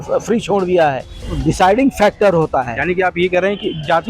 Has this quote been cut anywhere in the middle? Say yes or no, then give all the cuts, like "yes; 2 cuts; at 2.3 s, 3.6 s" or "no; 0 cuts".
yes; 1 cut; at 1.4 s